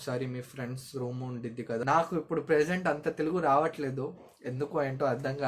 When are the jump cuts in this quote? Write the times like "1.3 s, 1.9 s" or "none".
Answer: 1.8 s